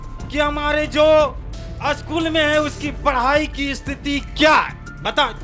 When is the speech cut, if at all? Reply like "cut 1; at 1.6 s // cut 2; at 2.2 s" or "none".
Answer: none